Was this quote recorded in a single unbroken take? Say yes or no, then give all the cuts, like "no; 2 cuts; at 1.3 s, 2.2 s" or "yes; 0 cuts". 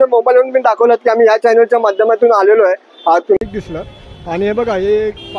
no; 1 cut; at 3.4 s